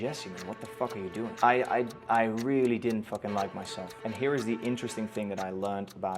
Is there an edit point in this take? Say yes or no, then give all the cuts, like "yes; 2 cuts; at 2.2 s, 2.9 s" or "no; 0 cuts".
yes; 2 cuts; at 1.3 s, 3.9 s